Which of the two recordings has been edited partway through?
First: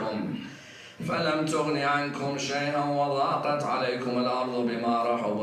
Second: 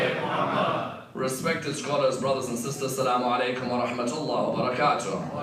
first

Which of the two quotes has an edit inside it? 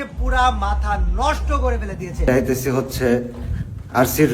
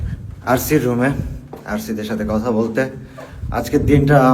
first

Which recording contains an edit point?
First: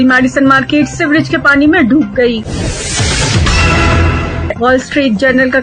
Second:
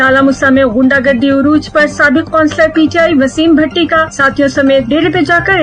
first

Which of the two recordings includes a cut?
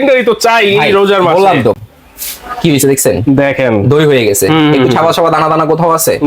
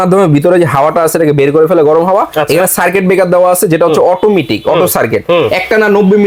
first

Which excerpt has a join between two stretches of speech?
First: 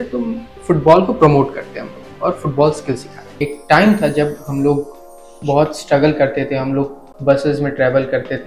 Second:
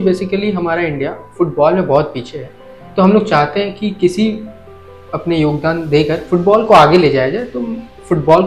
first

